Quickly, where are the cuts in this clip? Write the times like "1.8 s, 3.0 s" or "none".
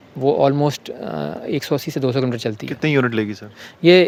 none